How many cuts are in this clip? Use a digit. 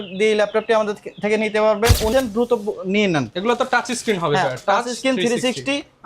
1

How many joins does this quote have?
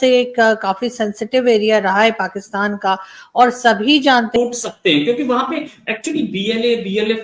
1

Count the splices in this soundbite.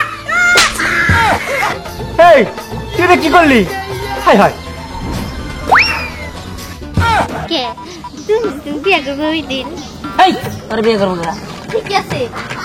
3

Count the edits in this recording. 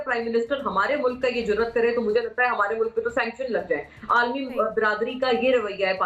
0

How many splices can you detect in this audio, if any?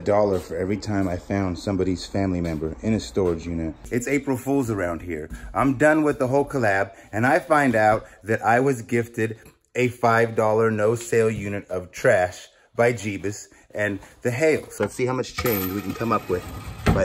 2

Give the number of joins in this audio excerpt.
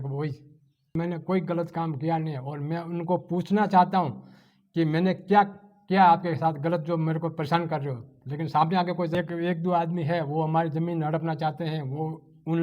2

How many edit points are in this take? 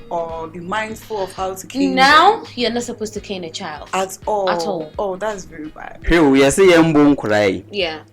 1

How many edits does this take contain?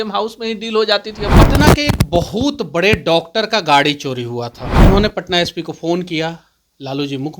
2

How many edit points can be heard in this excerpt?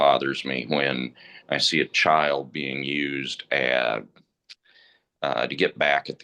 0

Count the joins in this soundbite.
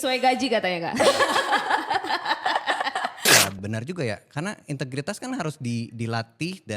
1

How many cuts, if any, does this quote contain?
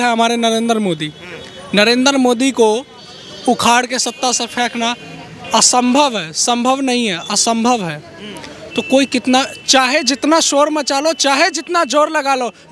0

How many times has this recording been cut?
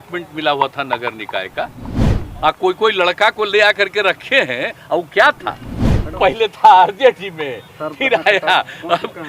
1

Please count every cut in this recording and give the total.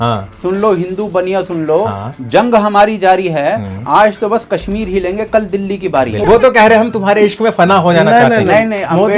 1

